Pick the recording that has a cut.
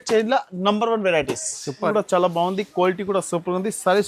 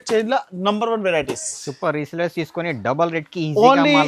first; 1 cut; at 1.9 s

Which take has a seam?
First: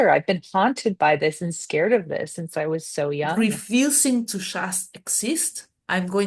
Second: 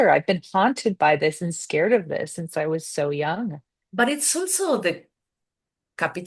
first; 1 cut; at 3.4 s

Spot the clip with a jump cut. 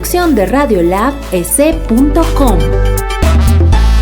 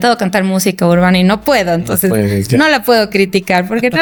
first; 1 cut; at 2.6 s

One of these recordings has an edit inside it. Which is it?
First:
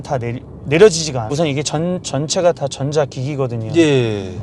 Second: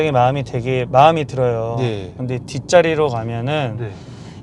first; 1 cut; at 1.2 s

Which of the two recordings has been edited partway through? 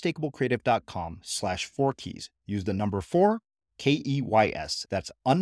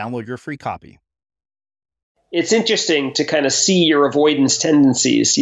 second; 1 cut; at 2.2 s

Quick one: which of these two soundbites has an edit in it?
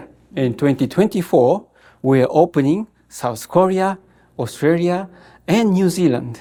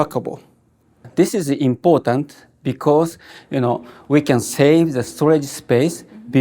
second; 1 cut; at 1.0 s

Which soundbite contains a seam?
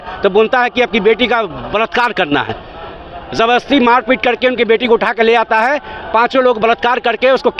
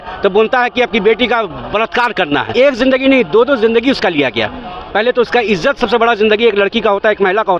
second; 1 cut; at 2.5 s

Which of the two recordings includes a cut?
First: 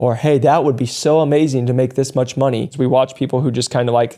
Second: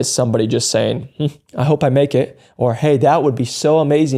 first; 1 cut; at 2.7 s

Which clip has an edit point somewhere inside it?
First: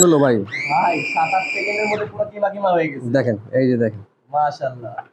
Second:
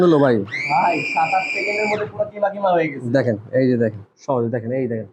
second; 1 cut; at 4.1 s

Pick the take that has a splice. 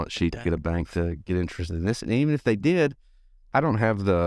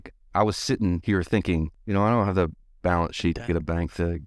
second; 2 cuts; at 1.0 s, 1.8 s

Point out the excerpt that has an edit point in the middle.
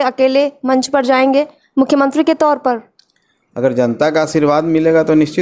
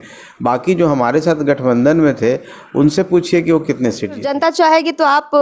second; 1 cut; at 4.3 s

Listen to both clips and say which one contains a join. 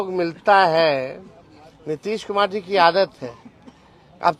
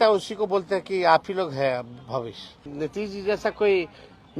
second; 1 cut; at 2.6 s

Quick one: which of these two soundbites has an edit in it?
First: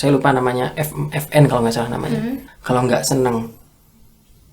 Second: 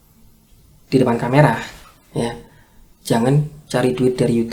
first; 1 cut; at 2.5 s

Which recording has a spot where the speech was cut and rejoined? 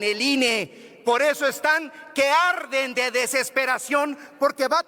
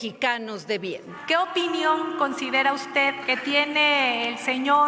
second; 2 cuts; at 1.1 s, 3.2 s

